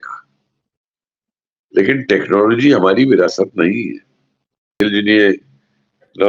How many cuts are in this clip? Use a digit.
1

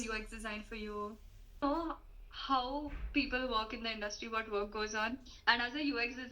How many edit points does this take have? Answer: 1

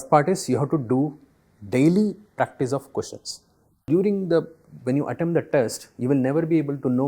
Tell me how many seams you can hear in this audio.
1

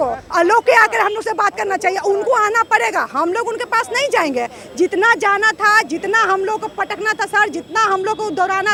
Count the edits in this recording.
0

